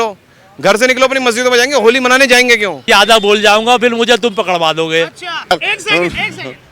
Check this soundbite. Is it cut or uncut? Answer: cut